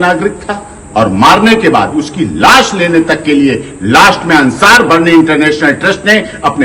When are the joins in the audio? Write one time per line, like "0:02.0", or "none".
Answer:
none

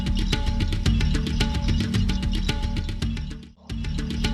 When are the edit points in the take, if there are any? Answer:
none

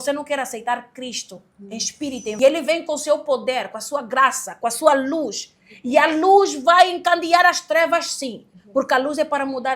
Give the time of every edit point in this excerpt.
0:02.4

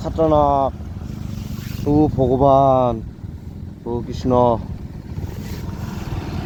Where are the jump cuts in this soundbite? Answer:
none

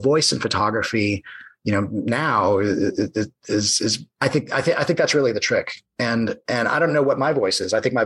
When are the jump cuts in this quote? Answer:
none

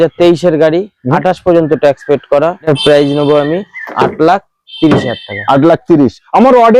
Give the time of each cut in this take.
0:02.7

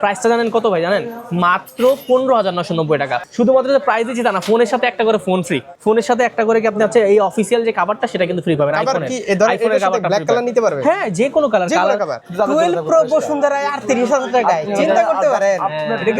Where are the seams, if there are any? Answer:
0:03.2
0:05.7
0:12.1

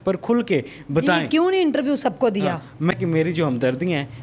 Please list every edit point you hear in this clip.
0:02.9

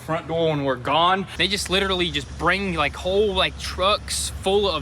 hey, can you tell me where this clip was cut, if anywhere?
0:01.3

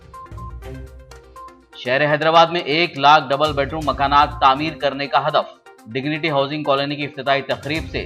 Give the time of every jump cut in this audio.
0:01.0

